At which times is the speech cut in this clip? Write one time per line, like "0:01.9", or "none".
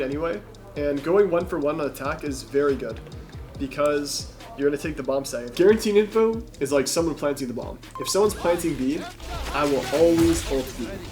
0:05.5